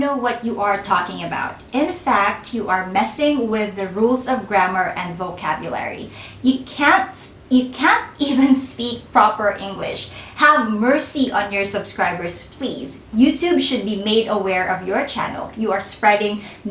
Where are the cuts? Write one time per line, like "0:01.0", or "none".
none